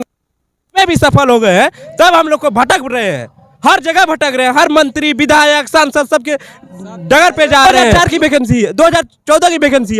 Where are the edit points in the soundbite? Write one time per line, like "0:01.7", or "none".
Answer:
0:07.8